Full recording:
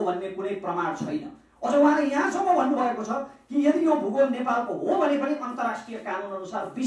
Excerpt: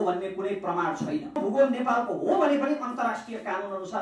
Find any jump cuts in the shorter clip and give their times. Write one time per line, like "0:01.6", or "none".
0:01.4